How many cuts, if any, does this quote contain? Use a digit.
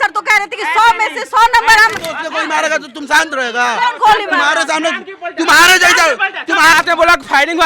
2